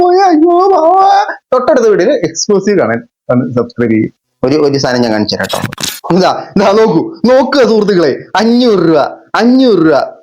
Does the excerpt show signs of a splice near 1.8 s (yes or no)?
no